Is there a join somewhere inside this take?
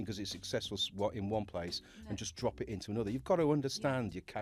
no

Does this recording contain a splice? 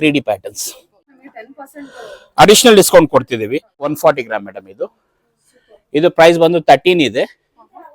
yes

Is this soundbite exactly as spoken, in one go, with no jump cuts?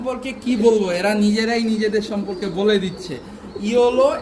yes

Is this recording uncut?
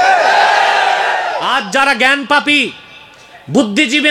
no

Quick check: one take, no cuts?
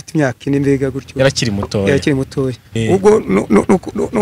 no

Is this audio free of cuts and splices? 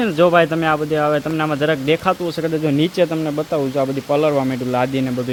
yes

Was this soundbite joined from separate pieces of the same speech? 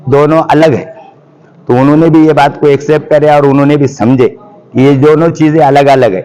no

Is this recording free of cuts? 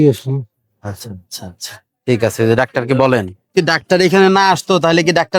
yes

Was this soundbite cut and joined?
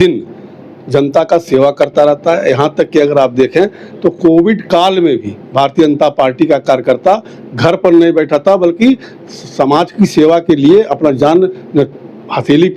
no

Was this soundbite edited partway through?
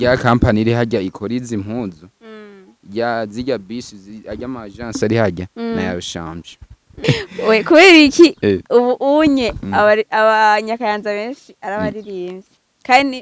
yes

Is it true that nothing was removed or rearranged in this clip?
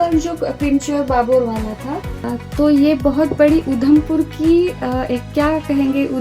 no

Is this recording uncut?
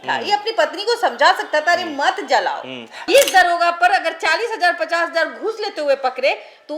no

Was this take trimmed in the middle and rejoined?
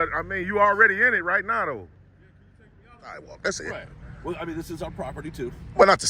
yes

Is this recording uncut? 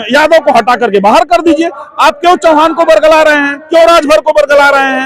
yes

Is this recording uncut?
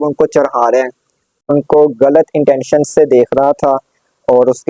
no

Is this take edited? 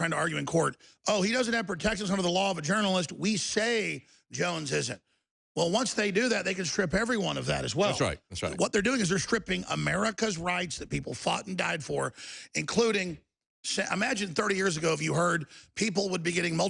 no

